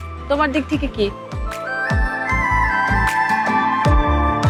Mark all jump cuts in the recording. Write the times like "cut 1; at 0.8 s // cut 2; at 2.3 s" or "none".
none

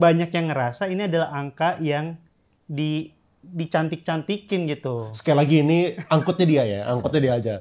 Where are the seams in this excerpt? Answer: none

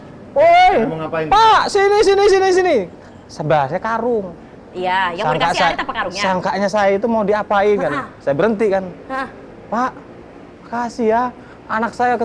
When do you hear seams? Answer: none

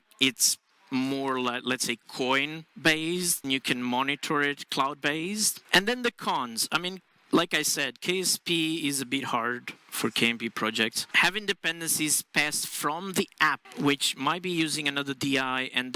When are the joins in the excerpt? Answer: cut 1; at 3.4 s // cut 2; at 5.6 s // cut 3; at 11.0 s // cut 4; at 13.7 s

